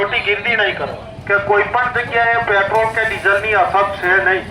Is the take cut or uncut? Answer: cut